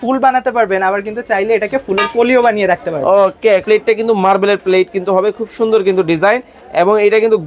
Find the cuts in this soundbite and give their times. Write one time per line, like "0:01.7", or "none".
0:03.6